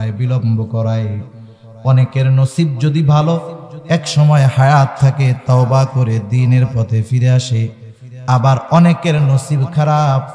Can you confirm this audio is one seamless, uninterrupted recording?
yes; 0 cuts

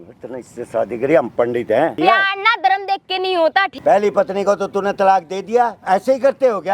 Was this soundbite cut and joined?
yes; 3 cuts; at 1.9 s, 3.7 s, 5.8 s

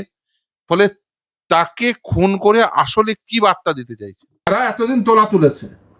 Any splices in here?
yes; 1 cut; at 4.5 s

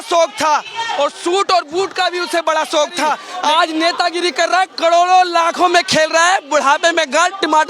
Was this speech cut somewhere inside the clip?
yes; 1 cut; at 3.3 s

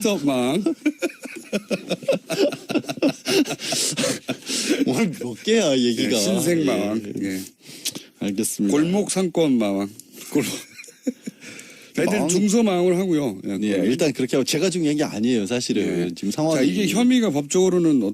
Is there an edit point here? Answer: yes; 1 cut; at 8.5 s

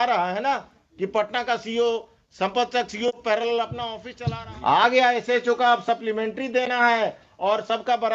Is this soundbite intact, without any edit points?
no; 1 cut; at 4.0 s

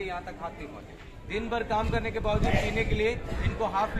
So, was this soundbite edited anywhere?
yes; 1 cut; at 1.1 s

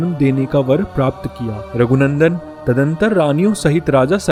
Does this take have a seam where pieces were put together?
no; 0 cuts

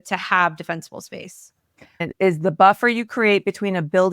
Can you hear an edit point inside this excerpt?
yes; 1 cut; at 2.0 s

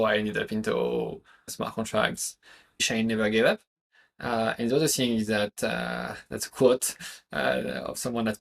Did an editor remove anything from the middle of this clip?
yes; 2 cuts; at 1.5 s, 2.9 s

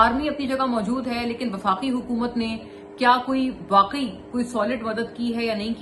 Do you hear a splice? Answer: no; 0 cuts

